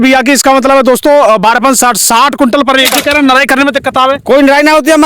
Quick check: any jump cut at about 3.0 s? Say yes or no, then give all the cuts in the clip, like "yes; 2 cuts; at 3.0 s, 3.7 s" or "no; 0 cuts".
yes; 1 cut; at 3.0 s